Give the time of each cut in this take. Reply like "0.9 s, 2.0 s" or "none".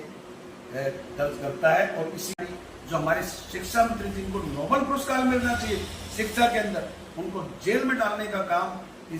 2.4 s